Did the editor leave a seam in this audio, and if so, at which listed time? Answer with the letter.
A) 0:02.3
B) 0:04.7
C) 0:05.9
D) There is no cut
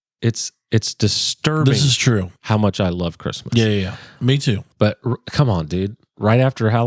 B